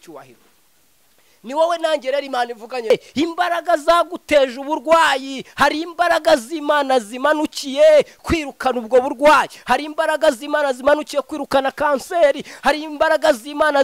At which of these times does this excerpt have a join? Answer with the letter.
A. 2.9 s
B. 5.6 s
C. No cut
A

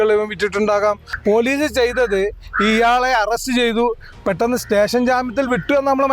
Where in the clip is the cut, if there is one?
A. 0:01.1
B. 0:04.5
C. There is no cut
A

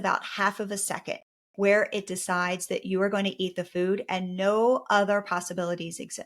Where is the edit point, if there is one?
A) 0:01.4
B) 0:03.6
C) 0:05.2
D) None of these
A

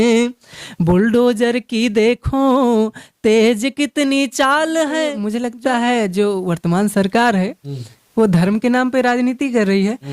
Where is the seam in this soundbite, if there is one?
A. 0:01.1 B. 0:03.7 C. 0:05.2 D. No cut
C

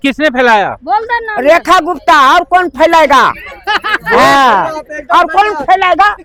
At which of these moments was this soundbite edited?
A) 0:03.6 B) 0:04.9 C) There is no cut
C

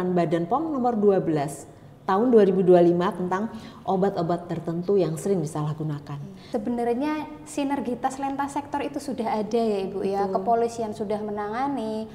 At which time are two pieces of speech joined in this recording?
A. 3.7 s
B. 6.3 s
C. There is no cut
B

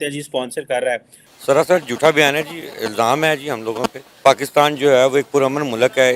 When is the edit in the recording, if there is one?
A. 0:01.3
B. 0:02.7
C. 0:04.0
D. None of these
A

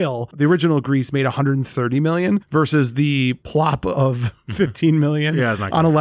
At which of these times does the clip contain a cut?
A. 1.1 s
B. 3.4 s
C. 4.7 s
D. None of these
B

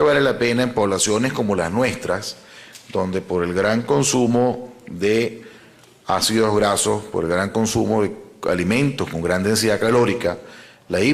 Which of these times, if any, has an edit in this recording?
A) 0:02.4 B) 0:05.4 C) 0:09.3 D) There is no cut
C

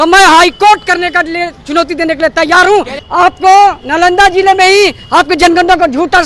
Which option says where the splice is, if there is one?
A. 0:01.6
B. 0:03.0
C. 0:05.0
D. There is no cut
B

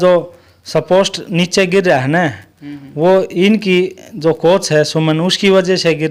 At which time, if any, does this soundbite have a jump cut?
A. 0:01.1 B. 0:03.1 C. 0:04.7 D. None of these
D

